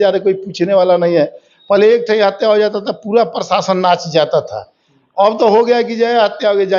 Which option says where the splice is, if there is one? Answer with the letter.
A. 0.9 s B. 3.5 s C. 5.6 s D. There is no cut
D